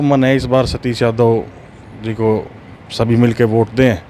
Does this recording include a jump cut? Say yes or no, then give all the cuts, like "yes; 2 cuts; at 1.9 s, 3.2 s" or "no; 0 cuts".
no; 0 cuts